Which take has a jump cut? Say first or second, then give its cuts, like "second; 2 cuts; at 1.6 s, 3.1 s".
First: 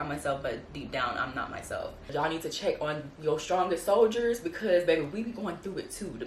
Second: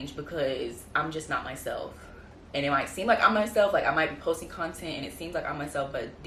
first; 1 cut; at 2.1 s